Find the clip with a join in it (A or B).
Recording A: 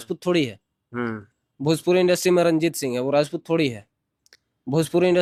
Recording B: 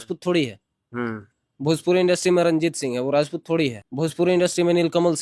B